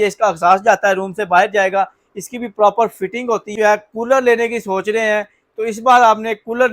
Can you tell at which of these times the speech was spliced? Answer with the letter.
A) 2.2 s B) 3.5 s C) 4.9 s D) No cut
B